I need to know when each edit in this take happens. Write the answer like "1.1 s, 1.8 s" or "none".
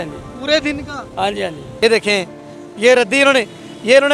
1.6 s

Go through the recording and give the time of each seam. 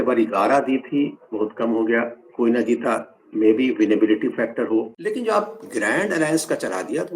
4.9 s

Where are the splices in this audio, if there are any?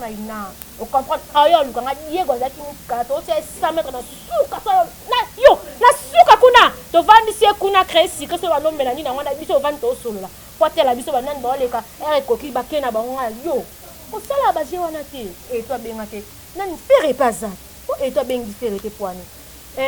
15.5 s

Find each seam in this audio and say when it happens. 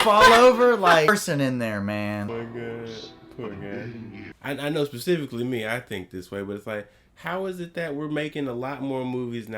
1.1 s, 2.3 s, 4.3 s

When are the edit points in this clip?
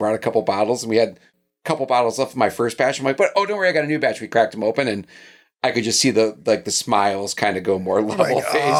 none

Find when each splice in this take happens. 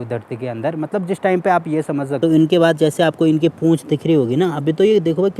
2.1 s

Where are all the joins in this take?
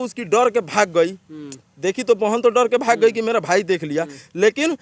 none

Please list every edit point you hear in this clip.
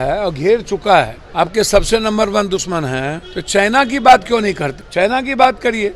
1.2 s, 3.3 s, 4.8 s

